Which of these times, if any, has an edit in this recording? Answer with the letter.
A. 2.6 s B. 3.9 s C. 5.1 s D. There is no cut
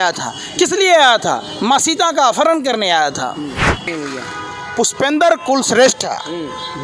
B